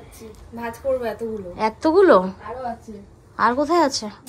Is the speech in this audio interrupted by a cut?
no; 0 cuts

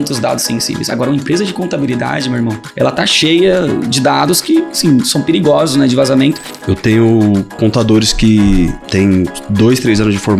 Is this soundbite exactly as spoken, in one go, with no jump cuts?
no; 3 cuts; at 2.6 s, 6.5 s, 9.0 s

